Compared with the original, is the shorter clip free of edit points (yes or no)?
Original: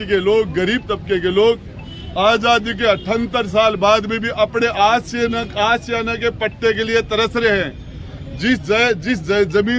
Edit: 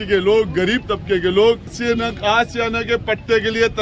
no